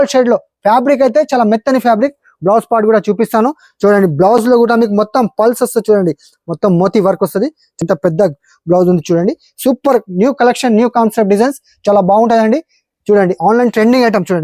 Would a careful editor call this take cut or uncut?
cut